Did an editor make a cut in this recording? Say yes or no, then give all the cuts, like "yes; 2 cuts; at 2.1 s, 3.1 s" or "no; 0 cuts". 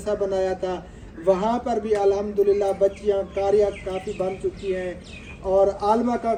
no; 0 cuts